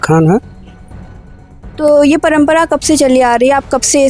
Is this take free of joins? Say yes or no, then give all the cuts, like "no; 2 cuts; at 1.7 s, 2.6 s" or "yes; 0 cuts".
yes; 0 cuts